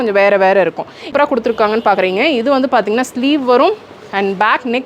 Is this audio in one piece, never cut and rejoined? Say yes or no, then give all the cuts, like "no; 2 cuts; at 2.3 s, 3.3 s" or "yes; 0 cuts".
no; 1 cut; at 1.1 s